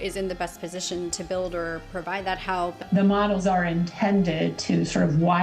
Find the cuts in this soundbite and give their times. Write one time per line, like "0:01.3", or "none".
0:02.9